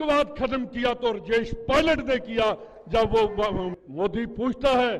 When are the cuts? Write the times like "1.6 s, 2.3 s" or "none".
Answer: 3.8 s